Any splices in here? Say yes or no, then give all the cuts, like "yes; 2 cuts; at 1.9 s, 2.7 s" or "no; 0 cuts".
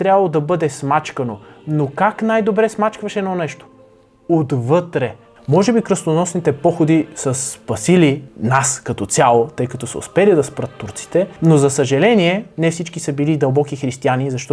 yes; 4 cuts; at 5.3 s, 8.3 s, 11.3 s, 12.5 s